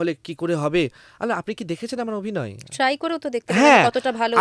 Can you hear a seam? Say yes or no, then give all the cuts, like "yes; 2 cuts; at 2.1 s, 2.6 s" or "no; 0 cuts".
no; 0 cuts